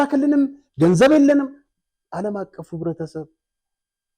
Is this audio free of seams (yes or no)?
yes